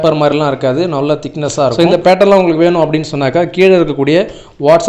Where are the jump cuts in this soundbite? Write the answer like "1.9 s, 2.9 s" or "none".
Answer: 1.4 s

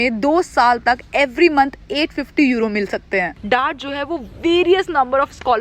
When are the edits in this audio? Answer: 3.4 s

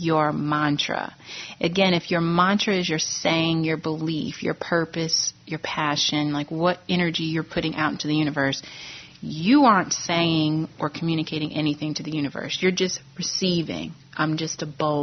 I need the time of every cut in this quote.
none

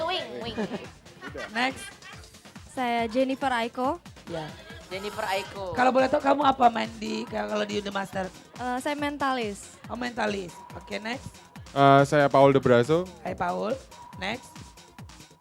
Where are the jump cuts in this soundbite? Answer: none

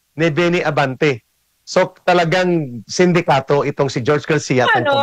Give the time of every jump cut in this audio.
none

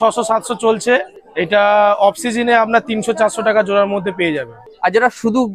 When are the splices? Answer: 1.2 s, 4.7 s

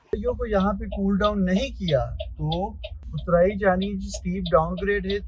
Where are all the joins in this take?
none

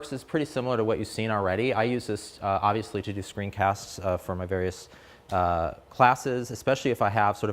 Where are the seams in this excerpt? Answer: 5.4 s

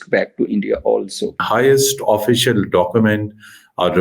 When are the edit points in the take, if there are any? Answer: 1.4 s

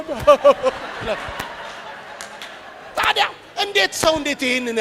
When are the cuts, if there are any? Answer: none

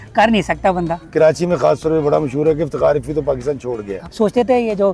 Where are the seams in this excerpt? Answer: 1.0 s, 3.9 s

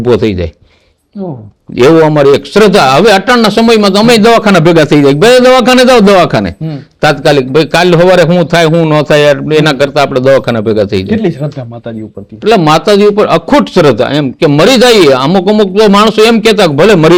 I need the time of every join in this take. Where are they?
none

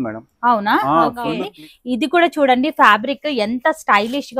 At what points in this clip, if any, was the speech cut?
1.4 s

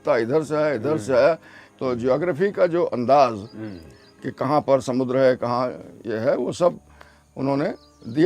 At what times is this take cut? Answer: 1.6 s

